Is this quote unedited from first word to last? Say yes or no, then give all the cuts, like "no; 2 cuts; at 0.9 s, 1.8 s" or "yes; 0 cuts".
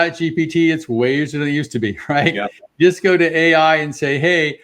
yes; 0 cuts